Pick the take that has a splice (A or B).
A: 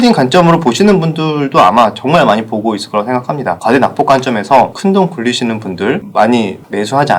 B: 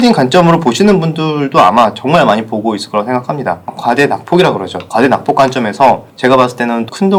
A